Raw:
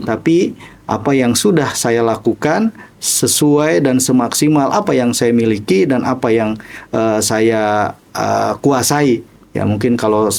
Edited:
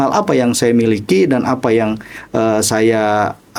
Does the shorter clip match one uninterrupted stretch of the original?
yes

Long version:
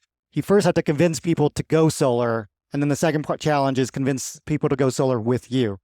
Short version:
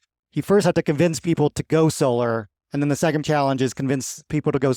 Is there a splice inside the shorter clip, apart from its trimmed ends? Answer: yes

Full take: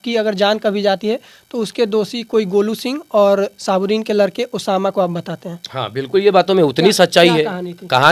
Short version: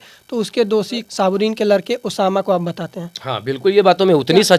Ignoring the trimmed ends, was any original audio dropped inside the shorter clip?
yes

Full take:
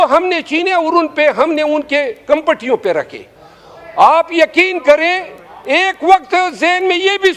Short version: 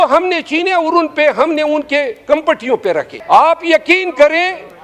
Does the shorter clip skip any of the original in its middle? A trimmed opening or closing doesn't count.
yes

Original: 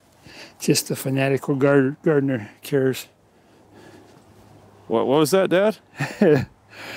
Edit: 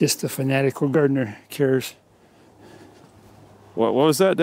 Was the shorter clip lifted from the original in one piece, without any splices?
no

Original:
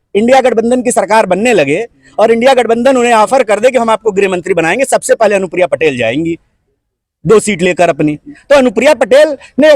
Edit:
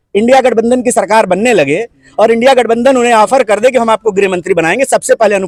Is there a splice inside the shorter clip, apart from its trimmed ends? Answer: no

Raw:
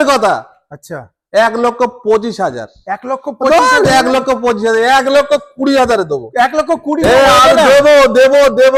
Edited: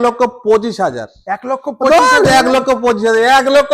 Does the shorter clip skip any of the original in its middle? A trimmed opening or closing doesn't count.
no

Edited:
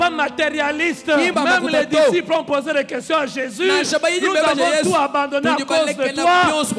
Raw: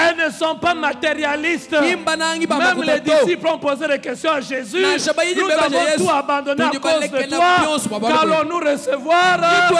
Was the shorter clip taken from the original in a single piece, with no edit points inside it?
no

